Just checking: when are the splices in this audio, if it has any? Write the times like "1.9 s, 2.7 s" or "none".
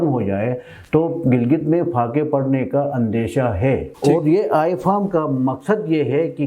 3.9 s